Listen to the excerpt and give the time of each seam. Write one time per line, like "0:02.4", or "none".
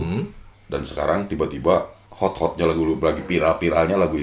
0:02.0